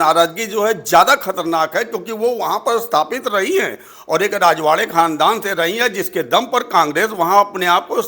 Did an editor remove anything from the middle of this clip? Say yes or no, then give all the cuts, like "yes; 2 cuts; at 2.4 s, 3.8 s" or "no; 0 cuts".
no; 0 cuts